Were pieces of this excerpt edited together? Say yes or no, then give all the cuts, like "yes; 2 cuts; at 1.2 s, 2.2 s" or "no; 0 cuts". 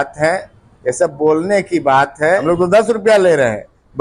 yes; 1 cut; at 2.4 s